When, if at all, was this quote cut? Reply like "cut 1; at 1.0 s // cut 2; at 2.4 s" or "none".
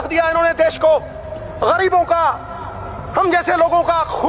none